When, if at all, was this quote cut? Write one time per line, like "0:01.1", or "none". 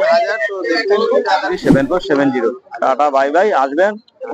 0:01.5